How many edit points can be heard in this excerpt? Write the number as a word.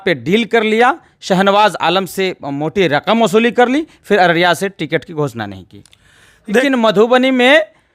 one